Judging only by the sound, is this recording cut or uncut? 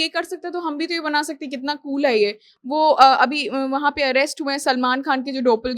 uncut